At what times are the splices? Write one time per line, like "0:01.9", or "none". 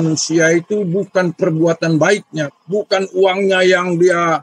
none